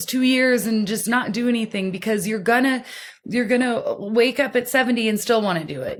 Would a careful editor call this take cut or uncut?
uncut